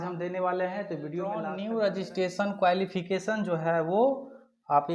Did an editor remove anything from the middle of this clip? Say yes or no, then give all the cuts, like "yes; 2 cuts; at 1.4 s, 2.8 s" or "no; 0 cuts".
yes; 1 cut; at 1.5 s